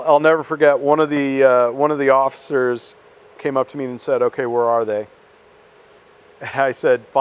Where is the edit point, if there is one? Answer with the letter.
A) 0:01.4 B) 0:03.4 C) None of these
B